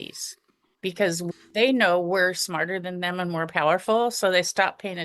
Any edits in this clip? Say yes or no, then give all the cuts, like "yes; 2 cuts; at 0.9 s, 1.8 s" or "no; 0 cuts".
yes; 1 cut; at 1.2 s